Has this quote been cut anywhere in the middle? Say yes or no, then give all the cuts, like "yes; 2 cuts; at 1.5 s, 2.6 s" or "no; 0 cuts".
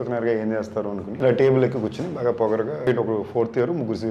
yes; 2 cuts; at 1.1 s, 2.9 s